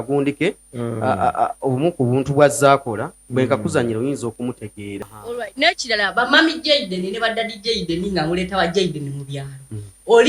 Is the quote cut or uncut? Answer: cut